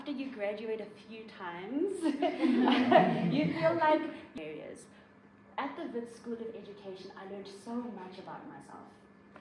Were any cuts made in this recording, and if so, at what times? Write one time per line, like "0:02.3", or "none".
0:04.2